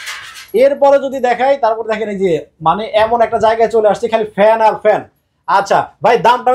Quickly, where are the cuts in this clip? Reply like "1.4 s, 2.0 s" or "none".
none